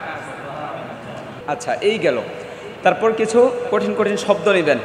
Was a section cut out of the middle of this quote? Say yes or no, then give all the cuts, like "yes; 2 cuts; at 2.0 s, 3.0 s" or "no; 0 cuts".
yes; 1 cut; at 1.3 s